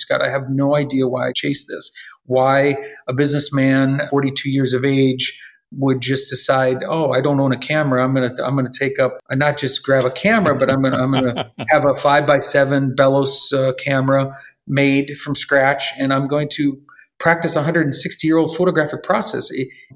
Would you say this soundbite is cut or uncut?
cut